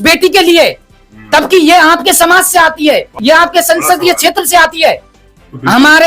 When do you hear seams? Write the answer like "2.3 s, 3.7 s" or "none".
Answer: 5.1 s